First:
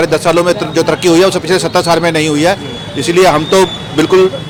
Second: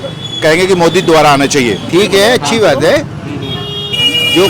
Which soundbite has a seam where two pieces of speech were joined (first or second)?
second